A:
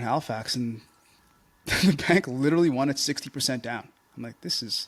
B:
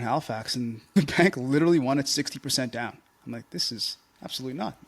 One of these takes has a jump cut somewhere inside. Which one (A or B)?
B